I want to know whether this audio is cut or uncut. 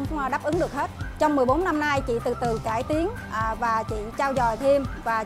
uncut